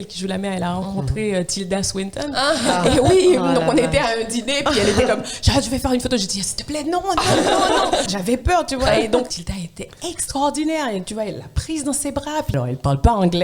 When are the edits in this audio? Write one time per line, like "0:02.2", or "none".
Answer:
0:08.1
0:09.4
0:12.5